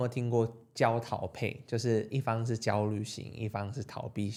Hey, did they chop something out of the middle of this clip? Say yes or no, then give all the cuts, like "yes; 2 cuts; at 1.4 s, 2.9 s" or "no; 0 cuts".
no; 0 cuts